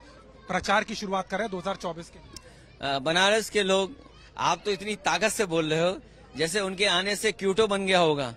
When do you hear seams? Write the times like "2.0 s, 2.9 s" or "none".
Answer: none